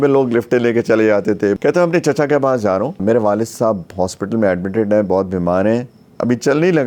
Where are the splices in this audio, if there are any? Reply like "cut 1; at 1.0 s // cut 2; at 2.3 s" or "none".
cut 1; at 1.6 s // cut 2; at 3.0 s // cut 3; at 6.0 s